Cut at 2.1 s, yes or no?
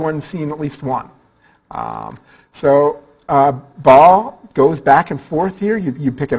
yes